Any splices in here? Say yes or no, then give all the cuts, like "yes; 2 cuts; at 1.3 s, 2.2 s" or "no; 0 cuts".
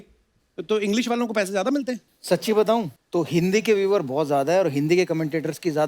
yes; 2 cuts; at 2.1 s, 3.0 s